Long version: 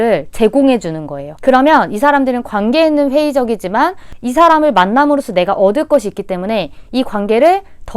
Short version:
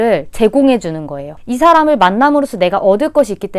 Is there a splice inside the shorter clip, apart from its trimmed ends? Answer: yes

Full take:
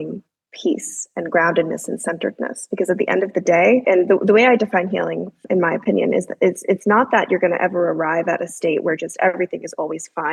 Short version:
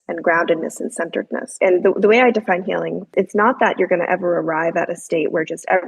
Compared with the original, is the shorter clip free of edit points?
no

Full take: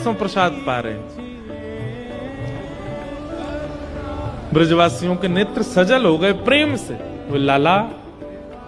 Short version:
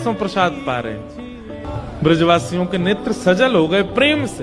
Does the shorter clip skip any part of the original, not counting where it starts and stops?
yes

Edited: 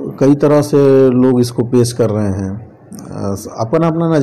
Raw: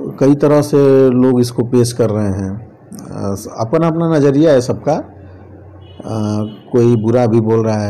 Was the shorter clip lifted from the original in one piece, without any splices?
yes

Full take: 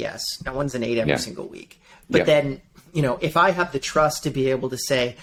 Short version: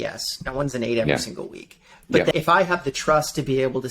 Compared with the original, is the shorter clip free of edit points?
no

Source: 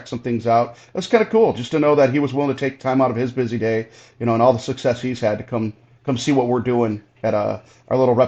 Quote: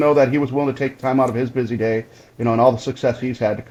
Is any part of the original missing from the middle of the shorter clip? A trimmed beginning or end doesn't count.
no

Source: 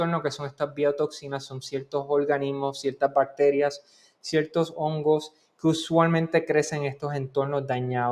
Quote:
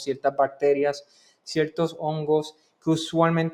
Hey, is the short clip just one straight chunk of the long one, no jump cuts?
yes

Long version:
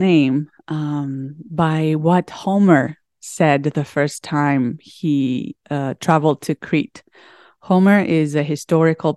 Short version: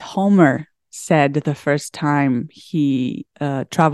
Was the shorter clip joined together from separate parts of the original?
no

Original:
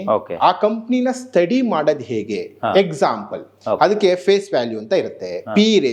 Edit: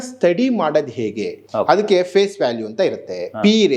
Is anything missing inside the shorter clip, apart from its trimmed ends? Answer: yes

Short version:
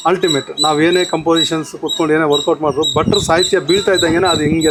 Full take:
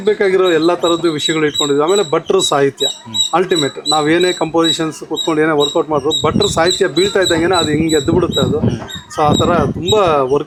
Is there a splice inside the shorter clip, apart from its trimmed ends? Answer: no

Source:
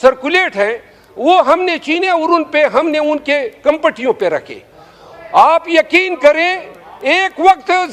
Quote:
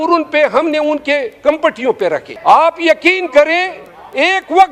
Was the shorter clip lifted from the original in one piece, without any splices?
no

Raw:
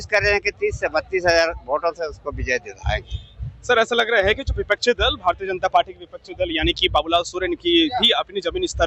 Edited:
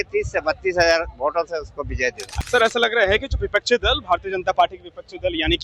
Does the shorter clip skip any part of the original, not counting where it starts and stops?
yes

